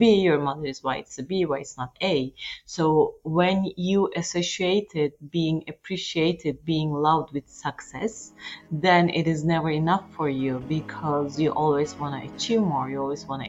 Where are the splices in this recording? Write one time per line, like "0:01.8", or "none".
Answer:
none

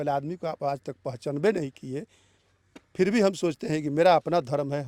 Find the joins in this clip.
none

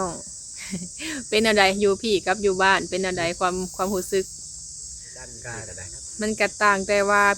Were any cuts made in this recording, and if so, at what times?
0:05.5

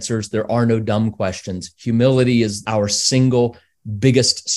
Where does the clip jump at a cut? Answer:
0:02.6

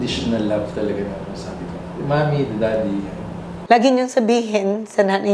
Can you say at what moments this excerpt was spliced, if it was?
0:03.5

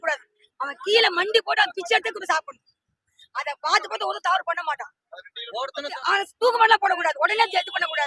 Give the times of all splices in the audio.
0:05.9

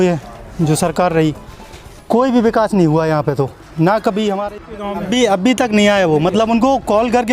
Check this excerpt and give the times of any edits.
0:04.7

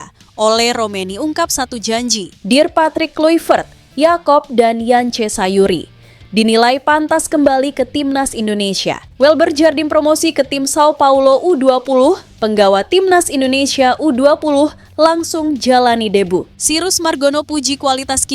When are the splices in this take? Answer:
0:02.3
0:09.1
0:16.6

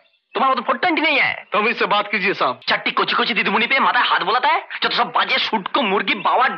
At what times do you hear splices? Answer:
0:02.6

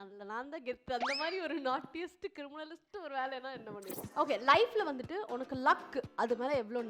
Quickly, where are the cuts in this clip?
0:04.1

